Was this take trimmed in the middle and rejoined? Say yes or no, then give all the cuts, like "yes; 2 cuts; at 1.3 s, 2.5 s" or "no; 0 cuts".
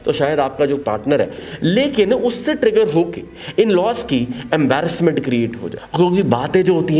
yes; 1 cut; at 1.4 s